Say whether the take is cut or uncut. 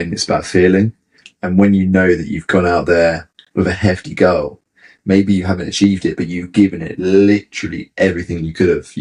uncut